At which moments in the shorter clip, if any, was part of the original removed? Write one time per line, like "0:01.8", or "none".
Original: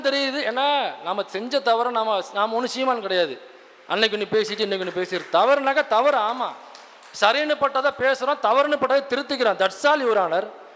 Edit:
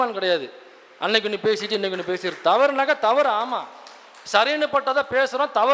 none